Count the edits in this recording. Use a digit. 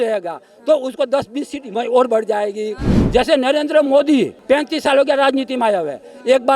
2